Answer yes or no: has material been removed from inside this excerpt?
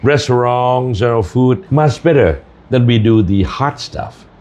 yes